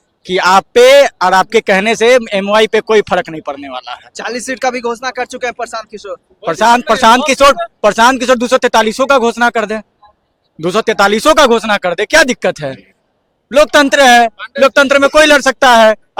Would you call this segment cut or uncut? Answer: uncut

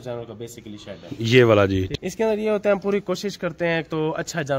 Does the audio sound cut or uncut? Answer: cut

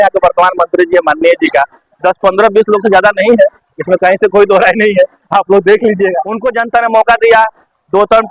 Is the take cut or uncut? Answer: cut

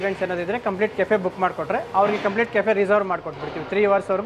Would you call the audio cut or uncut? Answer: uncut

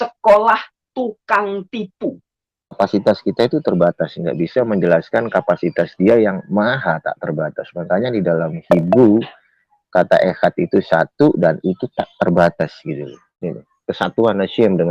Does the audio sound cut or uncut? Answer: cut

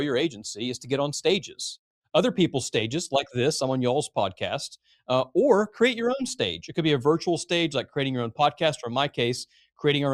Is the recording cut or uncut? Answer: uncut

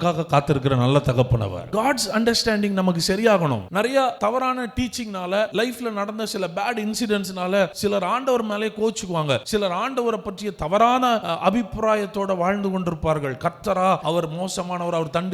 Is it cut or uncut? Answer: cut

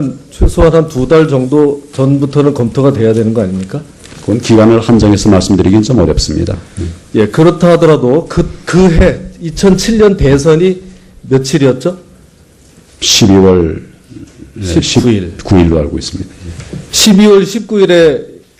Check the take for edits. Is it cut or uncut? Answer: cut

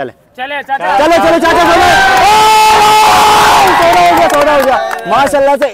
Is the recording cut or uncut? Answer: uncut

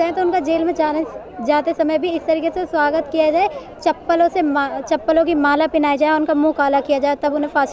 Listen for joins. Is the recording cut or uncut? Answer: uncut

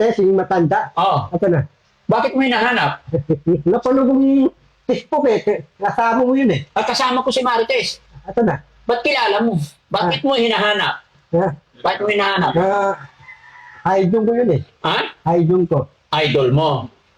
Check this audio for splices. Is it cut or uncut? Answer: uncut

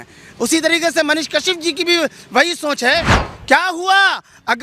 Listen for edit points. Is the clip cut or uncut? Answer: cut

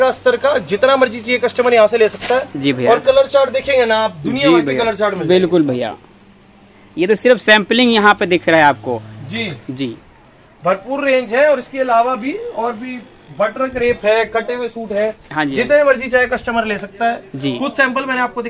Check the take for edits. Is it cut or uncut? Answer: uncut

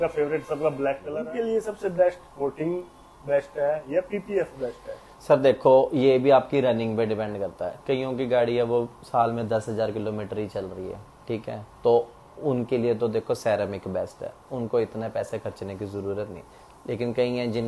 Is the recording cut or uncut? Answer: uncut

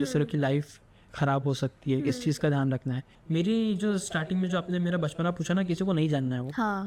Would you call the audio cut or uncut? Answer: cut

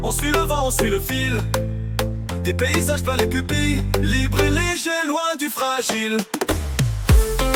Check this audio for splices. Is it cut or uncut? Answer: uncut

